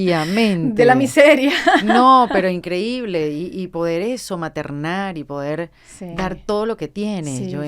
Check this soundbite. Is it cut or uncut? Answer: uncut